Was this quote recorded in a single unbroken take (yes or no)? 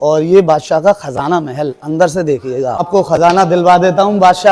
no